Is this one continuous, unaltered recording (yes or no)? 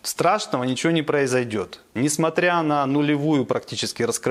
no